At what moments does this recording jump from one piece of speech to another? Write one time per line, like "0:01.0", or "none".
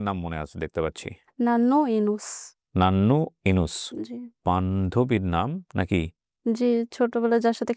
0:01.3
0:04.4